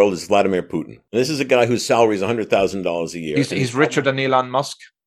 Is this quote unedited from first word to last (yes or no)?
no